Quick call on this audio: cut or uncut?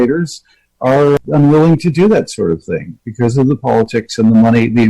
cut